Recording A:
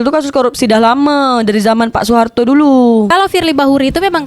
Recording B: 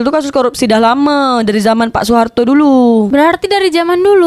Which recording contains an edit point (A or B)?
A